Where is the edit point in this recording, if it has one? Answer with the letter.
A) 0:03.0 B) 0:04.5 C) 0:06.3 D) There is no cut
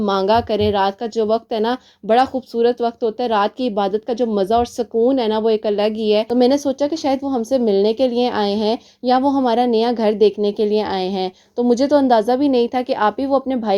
C